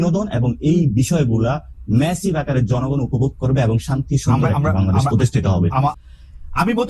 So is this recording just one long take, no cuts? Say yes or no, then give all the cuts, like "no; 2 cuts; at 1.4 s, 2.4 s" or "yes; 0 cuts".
no; 1 cut; at 5.9 s